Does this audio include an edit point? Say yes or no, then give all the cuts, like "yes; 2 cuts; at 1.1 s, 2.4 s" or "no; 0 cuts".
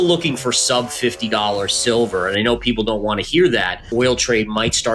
yes; 1 cut; at 3.9 s